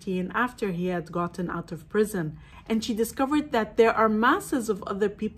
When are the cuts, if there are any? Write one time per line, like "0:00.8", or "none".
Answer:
0:02.4